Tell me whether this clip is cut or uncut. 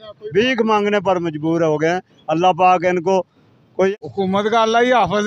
cut